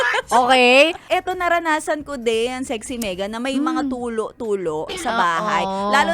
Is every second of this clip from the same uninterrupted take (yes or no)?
no